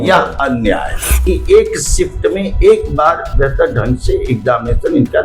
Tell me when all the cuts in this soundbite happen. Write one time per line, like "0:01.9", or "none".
0:01.2